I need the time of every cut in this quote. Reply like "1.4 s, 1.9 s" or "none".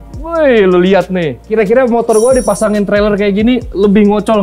1.4 s